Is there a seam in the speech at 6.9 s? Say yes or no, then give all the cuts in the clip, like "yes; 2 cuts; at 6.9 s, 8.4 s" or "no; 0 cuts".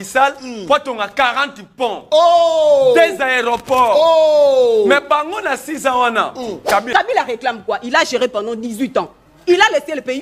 yes; 1 cut; at 6.9 s